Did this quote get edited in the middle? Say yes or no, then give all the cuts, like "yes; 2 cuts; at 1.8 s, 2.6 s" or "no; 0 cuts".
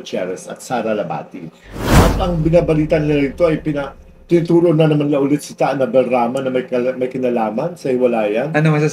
yes; 1 cut; at 2.0 s